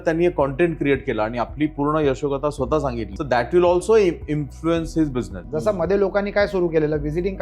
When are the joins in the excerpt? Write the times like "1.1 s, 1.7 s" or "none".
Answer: 3.1 s, 5.4 s